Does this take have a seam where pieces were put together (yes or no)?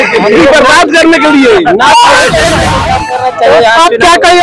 yes